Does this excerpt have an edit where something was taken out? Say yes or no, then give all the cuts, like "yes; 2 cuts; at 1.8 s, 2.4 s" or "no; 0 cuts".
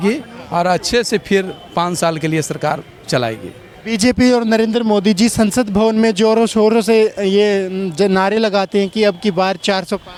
no; 0 cuts